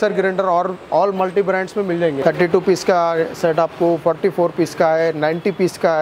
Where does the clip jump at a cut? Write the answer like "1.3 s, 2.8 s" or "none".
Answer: 2.2 s